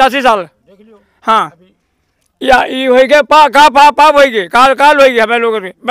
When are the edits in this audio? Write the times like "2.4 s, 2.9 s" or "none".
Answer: none

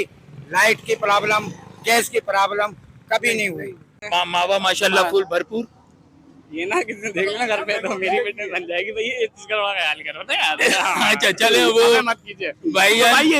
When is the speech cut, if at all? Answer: 4.0 s

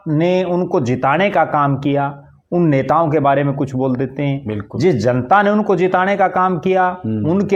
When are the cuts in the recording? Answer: none

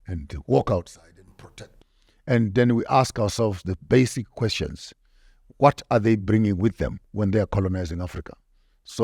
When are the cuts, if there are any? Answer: 1.7 s

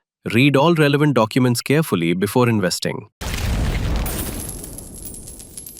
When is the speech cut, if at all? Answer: 3.2 s

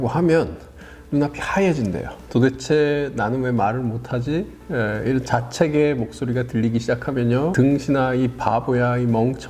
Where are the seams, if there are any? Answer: 2.1 s, 7.5 s

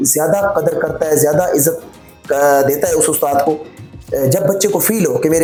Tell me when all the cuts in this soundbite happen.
none

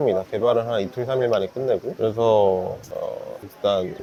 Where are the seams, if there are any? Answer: none

